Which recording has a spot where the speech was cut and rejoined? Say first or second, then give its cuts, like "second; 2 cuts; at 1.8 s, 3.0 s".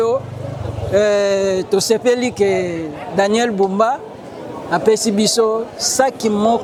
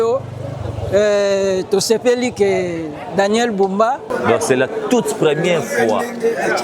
second; 1 cut; at 4.1 s